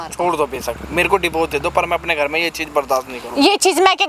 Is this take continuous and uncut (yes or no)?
yes